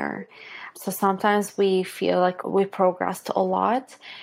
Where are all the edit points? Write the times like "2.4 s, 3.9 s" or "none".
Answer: 2.4 s